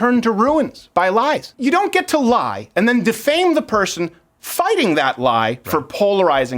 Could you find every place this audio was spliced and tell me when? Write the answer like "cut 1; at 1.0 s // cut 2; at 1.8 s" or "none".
cut 1; at 1.5 s